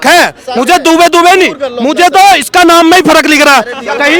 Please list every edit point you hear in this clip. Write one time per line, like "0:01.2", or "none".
none